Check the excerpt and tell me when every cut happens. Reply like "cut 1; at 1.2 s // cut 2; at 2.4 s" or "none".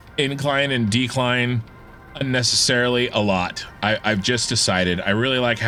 none